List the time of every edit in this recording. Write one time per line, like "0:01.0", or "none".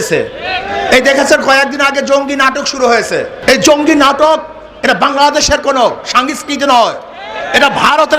0:03.3